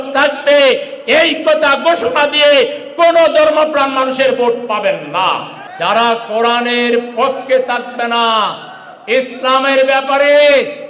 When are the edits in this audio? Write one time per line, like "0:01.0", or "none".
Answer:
0:05.6